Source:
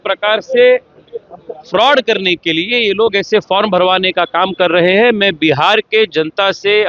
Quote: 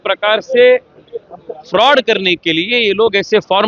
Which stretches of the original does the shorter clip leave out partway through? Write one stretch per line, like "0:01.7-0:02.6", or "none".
none

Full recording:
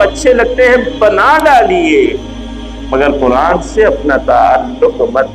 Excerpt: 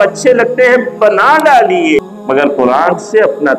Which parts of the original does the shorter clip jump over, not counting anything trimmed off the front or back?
0:02.0-0:02.6

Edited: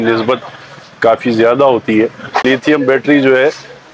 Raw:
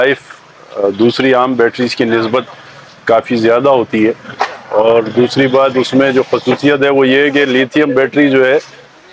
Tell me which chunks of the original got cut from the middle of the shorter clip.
0:04.5-0:07.5

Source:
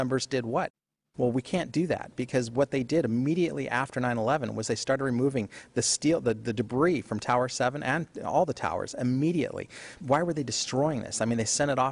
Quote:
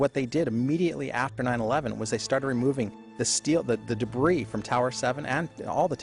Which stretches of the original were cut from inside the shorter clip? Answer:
none

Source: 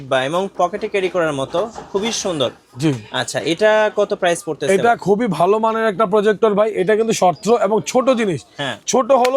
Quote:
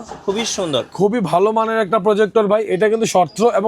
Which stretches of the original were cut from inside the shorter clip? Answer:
0:02.6-0:05.0

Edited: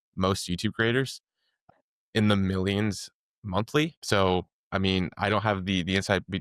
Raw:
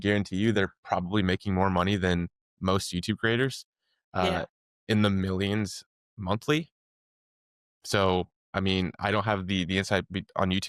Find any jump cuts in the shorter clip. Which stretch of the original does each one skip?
0:04.1-0:04.4
0:06.7-0:07.8

